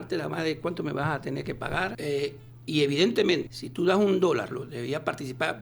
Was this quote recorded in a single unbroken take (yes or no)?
no